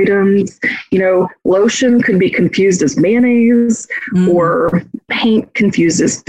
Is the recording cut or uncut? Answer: cut